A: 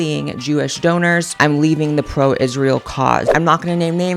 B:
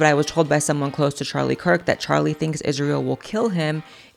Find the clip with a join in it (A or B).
A